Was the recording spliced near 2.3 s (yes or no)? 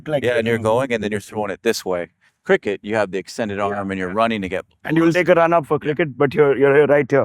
yes